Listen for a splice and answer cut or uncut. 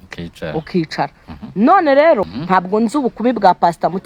cut